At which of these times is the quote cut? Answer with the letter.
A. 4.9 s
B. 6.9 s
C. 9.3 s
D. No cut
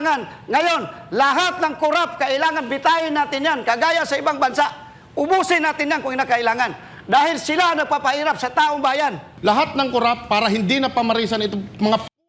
C